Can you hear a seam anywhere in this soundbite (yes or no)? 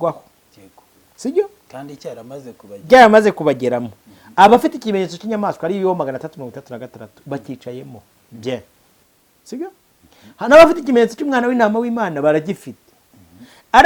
no